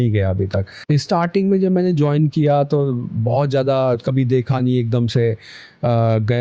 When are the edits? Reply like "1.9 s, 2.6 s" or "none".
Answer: 1.0 s

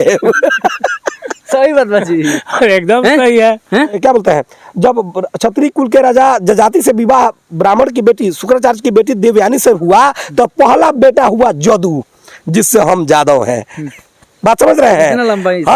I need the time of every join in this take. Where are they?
4.0 s

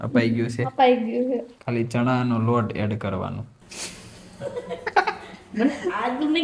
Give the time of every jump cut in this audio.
1.6 s, 3.6 s

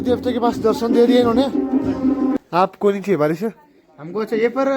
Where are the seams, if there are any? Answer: 2.3 s

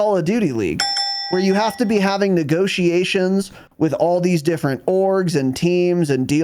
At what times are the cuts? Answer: none

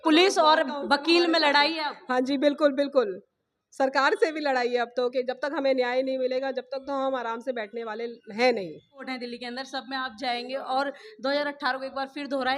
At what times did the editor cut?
9.1 s

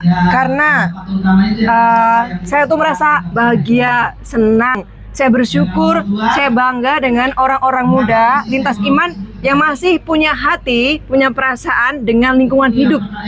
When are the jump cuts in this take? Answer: none

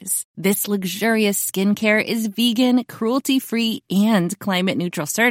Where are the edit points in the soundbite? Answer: none

